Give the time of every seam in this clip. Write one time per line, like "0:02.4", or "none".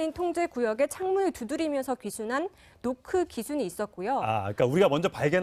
none